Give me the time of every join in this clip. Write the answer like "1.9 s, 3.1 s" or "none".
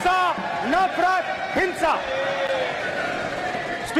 none